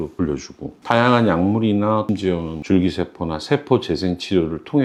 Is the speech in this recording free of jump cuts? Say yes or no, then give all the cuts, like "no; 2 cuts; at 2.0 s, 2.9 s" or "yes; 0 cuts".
yes; 0 cuts